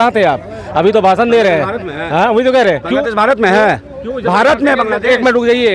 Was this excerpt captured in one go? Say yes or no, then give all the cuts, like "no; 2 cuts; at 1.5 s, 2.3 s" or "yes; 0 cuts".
yes; 0 cuts